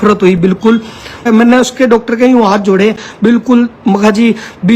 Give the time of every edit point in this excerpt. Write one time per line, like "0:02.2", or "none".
0:01.2